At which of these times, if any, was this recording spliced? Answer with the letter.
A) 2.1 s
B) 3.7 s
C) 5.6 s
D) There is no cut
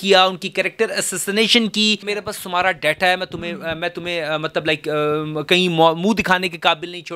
A